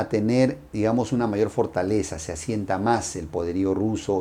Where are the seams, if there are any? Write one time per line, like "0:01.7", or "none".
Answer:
none